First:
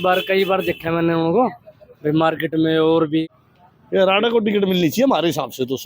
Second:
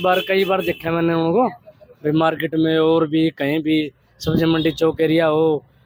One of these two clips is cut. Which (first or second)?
first